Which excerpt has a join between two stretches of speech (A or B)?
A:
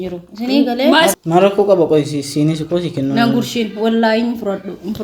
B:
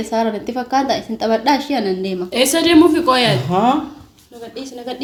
A